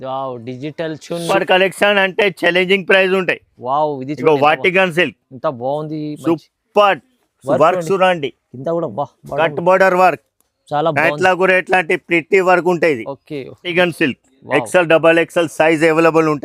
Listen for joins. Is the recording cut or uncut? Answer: cut